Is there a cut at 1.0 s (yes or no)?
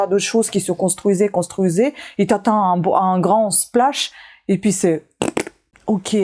no